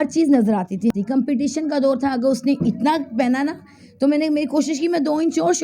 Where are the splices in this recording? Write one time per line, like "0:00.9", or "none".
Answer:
0:00.9